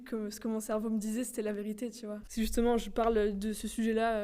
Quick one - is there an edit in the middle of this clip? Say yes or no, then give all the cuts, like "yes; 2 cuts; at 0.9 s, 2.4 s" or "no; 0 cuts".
yes; 1 cut; at 2.2 s